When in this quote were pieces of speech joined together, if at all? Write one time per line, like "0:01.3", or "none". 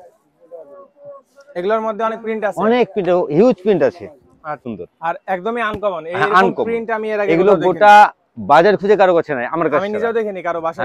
0:04.6